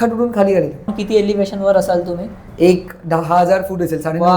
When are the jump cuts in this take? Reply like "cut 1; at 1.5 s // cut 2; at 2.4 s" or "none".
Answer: cut 1; at 1.0 s